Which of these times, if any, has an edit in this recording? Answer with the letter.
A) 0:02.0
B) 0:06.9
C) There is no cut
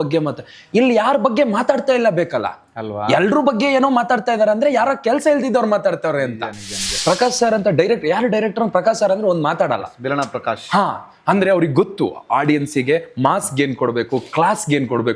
B